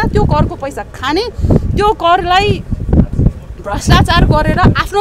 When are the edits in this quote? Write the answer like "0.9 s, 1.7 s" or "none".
none